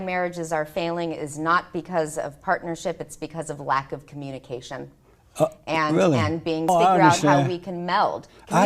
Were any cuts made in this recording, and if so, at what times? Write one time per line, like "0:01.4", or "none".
0:06.7